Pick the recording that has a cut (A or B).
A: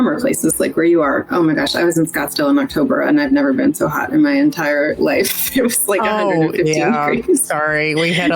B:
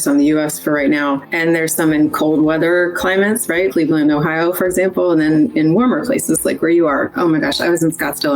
B